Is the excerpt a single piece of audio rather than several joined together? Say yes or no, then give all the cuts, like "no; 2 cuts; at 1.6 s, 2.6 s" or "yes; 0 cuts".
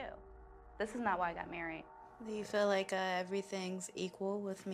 yes; 0 cuts